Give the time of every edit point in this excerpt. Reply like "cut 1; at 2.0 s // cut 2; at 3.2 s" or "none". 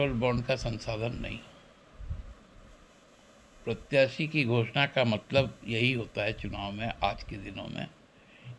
none